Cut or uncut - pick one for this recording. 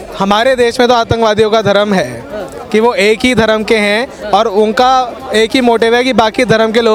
uncut